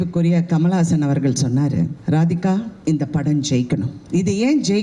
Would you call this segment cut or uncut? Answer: cut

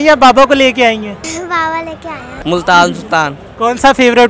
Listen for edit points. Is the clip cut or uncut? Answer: cut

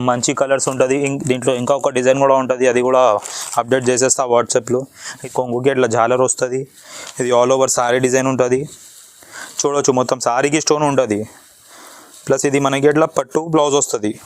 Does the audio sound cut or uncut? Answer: cut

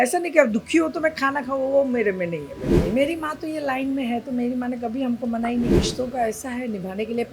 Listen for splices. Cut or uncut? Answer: cut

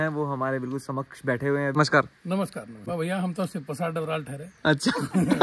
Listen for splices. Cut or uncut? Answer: cut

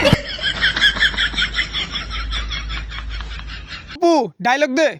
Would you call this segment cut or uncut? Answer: cut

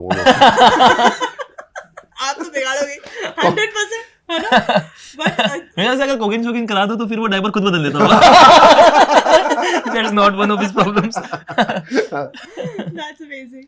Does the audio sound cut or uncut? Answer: uncut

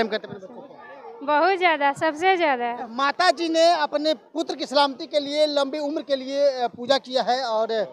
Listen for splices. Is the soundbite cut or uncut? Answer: cut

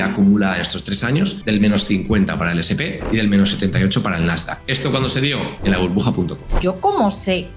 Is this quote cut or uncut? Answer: cut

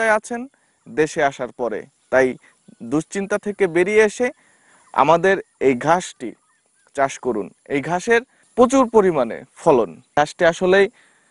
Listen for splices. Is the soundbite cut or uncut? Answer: cut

